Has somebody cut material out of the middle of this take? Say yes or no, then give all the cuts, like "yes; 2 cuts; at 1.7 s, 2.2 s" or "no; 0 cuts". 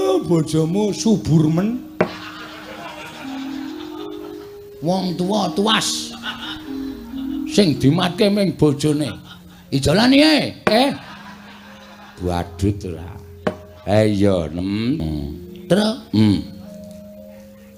yes; 1 cut; at 15.0 s